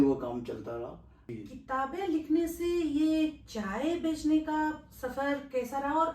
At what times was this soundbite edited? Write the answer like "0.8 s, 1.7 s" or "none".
1.3 s